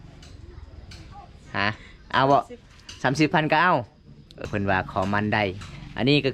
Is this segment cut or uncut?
cut